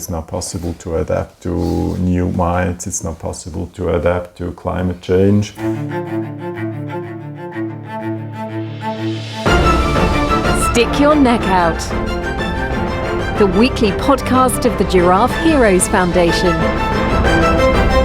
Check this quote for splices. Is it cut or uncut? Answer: cut